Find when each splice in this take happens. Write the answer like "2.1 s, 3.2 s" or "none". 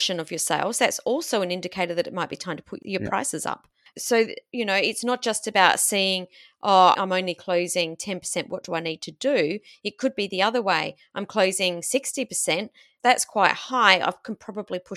none